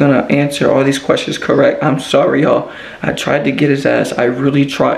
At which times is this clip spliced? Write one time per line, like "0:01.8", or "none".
none